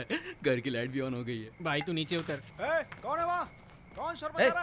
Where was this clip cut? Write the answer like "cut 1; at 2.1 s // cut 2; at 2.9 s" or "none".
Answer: cut 1; at 1.5 s // cut 2; at 2.5 s